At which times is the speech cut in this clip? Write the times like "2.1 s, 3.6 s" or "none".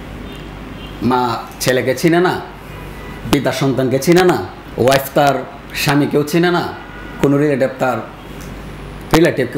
4.6 s